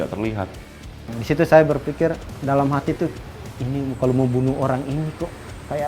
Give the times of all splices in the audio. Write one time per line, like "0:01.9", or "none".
0:01.1
0:02.3

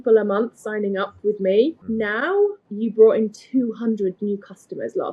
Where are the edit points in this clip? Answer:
0:02.4

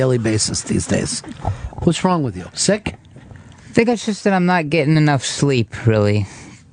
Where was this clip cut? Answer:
0:02.4

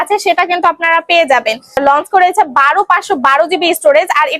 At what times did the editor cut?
0:01.8

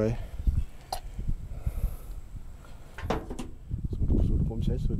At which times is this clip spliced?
0:03.0

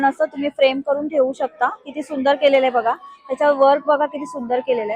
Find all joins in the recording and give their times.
none

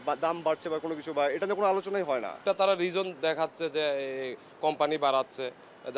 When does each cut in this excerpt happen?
0:02.3

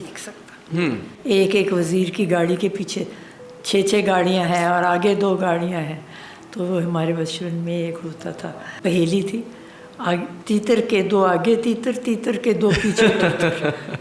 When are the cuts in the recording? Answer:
0:01.1
0:08.7

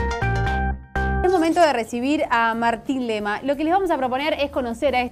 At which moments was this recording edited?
0:01.2

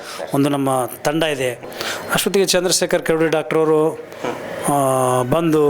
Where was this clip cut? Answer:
0:01.7

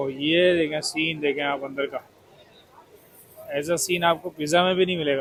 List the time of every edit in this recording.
none

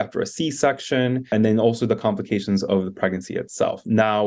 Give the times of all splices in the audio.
0:01.3

